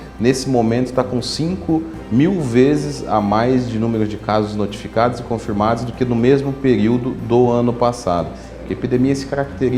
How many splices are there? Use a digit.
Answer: 1